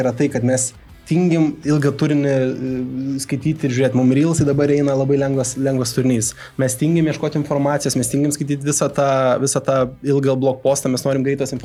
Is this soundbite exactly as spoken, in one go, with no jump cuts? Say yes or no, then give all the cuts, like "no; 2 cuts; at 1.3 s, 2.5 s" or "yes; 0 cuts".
yes; 0 cuts